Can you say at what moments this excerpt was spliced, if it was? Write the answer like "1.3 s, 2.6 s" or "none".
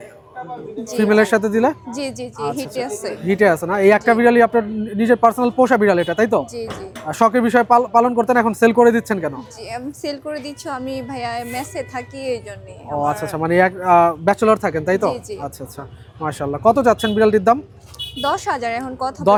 none